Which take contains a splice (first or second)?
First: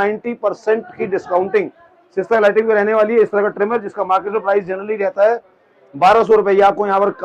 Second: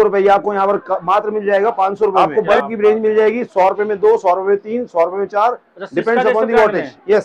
second